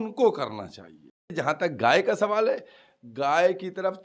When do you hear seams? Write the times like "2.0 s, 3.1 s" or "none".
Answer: 1.3 s